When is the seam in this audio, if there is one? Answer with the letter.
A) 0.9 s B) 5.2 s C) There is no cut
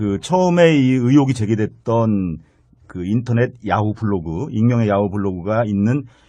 B